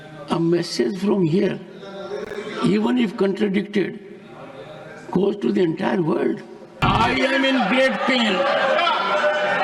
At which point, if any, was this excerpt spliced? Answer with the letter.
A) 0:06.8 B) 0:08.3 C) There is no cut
A